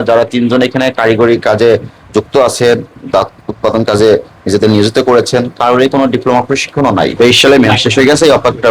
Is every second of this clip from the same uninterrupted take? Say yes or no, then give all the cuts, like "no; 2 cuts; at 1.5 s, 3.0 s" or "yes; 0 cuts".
no; 1 cut; at 7.1 s